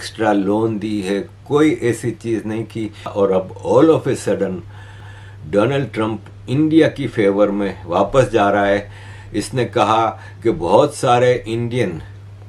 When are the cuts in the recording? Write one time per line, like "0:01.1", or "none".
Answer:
none

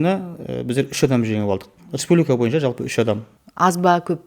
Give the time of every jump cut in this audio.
0:03.4

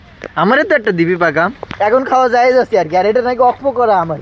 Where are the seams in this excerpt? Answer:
0:01.6

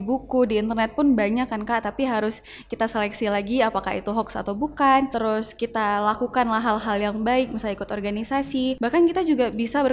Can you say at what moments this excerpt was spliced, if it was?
0:05.1
0:08.8

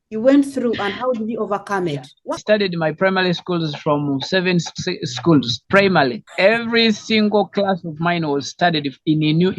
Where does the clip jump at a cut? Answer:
0:02.3

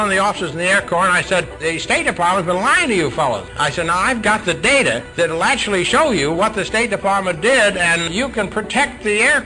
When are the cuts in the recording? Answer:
0:01.5
0:03.6
0:05.1
0:08.1

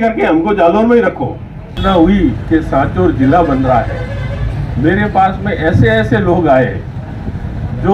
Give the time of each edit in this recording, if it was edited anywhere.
0:01.8

